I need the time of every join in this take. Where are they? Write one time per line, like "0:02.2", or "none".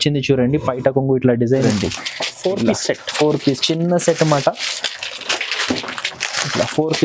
0:01.7